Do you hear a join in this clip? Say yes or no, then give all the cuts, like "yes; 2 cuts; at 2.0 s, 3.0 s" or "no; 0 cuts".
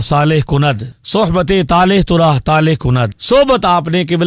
no; 0 cuts